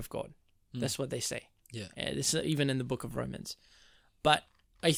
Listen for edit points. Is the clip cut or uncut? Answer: uncut